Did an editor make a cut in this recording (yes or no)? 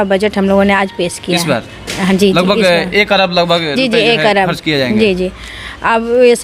no